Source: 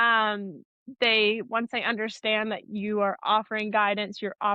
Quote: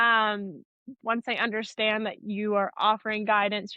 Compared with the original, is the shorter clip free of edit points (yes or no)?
no